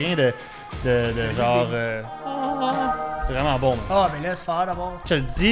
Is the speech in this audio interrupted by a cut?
no; 0 cuts

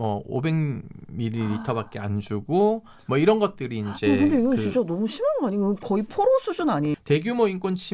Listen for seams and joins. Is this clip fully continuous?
no; 1 cut; at 7.0 s

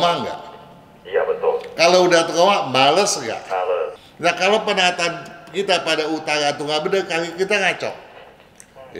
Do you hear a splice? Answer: yes; 1 cut; at 4.0 s

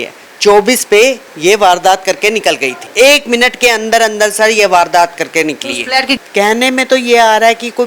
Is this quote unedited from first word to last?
no; 2 cuts; at 2.8 s, 6.2 s

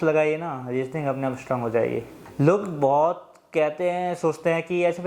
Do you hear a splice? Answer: yes; 1 cut; at 2.2 s

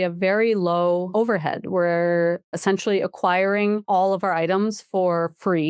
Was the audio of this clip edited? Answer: yes; 3 cuts; at 1.1 s, 2.5 s, 3.8 s

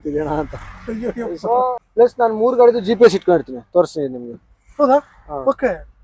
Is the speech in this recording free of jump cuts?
no; 1 cut; at 1.8 s

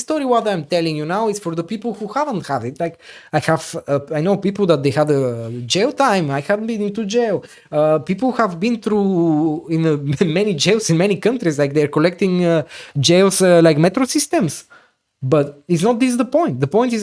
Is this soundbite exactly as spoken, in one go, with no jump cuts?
yes; 0 cuts

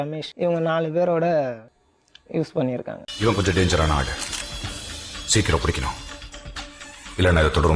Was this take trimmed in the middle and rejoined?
no; 0 cuts

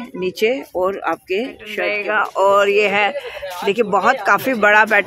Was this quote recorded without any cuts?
no; 1 cut; at 1.9 s

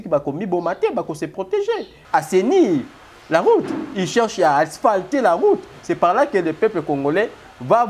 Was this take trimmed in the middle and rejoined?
yes; 1 cut; at 1.9 s

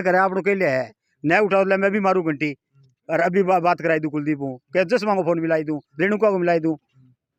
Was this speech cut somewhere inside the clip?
no; 0 cuts

